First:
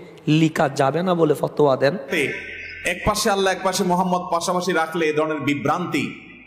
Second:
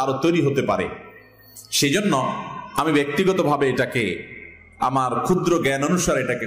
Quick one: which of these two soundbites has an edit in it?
first; 1 cut; at 2.1 s

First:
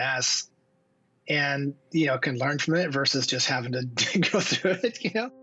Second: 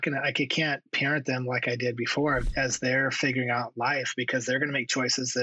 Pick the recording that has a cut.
second; 1 cut; at 2.4 s

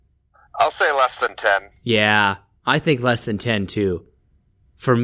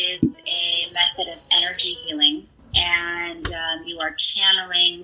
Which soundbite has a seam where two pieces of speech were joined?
second; 1 cut; at 2.6 s

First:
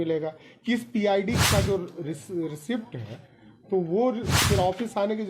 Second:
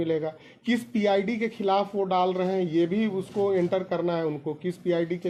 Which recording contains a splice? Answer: first; 2 cuts; at 1.4 s, 4.3 s

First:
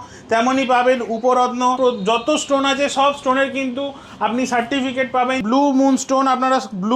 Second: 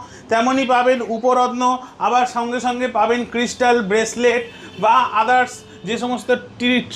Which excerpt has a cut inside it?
first; 2 cuts; at 1.8 s, 5.4 s

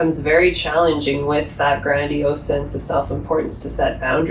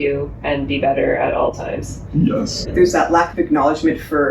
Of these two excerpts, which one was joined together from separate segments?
second; 1 cut; at 2.7 s

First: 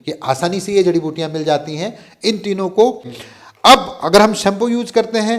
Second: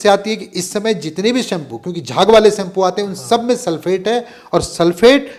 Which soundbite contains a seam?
first; 1 cut; at 3.2 s

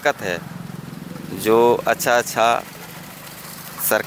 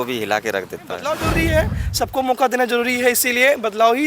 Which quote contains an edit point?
second; 1 cut; at 1.2 s

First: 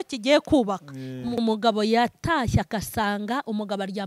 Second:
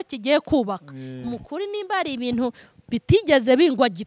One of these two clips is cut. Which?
first; 1 cut; at 1.4 s

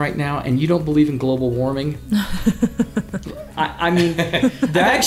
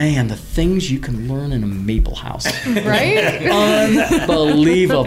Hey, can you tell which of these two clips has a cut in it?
first; 1 cut; at 3.4 s

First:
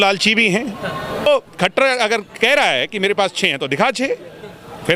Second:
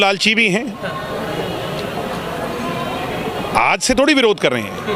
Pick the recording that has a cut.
first; 1 cut; at 1.3 s

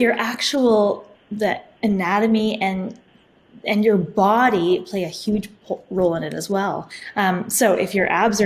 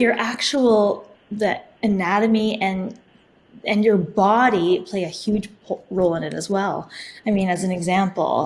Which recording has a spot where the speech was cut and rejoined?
first; 1 cut; at 7.0 s

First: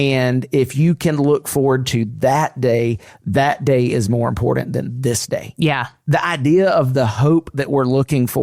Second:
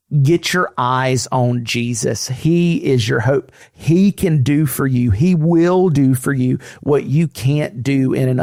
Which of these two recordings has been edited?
first; 1 cut; at 5.9 s

